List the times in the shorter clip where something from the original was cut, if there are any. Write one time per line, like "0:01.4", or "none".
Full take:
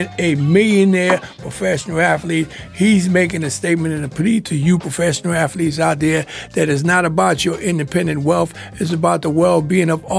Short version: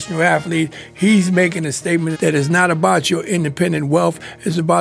0:02.1